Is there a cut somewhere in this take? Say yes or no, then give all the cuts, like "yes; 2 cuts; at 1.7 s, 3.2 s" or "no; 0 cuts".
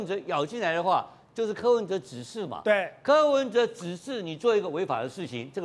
no; 0 cuts